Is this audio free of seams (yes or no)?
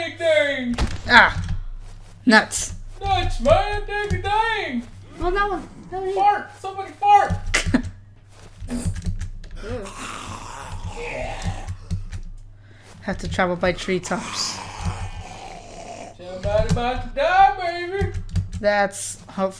yes